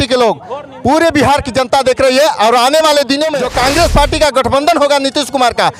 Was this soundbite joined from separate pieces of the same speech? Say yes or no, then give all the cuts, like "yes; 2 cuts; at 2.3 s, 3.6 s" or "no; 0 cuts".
yes; 1 cut; at 3.4 s